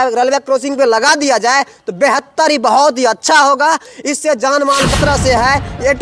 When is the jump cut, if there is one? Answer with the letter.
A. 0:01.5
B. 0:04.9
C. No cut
B